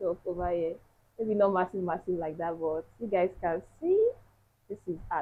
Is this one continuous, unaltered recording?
yes; 0 cuts

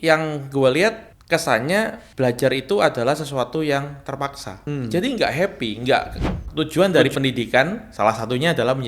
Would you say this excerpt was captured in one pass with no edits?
no; 4 cuts; at 1.1 s, 2.0 s, 4.6 s, 6.4 s

